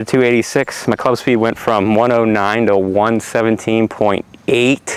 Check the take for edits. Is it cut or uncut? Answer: uncut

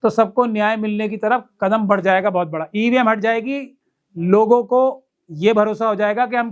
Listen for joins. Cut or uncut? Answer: uncut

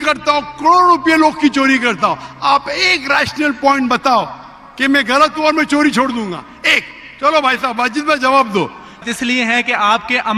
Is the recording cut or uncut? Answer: cut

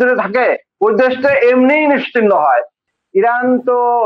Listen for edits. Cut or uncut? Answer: cut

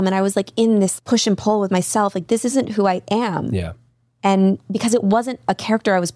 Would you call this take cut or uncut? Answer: cut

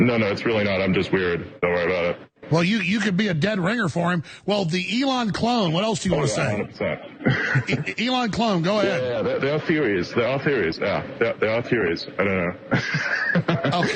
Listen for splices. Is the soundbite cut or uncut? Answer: uncut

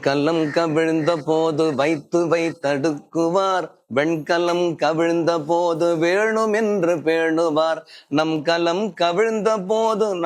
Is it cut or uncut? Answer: uncut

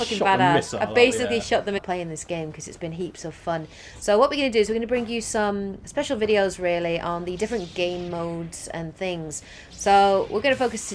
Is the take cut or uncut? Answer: uncut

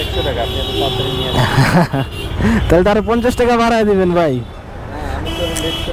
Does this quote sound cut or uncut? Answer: uncut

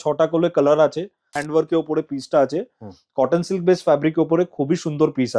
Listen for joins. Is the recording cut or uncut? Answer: cut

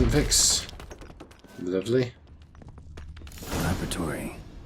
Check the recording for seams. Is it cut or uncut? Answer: uncut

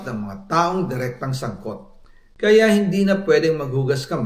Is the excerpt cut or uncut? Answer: uncut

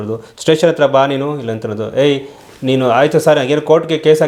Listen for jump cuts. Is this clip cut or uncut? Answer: uncut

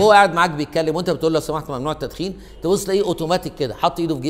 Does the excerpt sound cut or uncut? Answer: uncut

